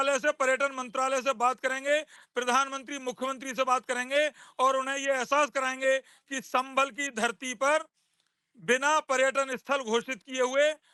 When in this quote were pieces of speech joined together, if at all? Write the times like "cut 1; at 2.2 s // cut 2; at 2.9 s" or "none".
none